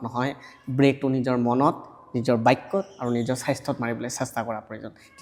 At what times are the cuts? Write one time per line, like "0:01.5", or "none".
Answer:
none